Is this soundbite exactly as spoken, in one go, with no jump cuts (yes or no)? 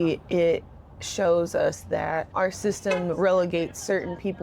no